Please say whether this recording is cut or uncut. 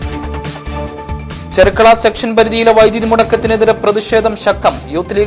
cut